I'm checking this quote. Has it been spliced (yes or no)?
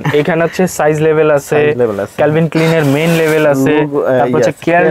no